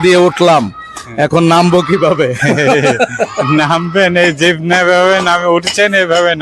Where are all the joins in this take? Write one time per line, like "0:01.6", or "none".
none